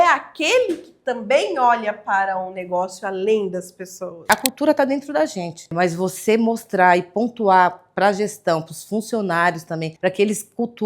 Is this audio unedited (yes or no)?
no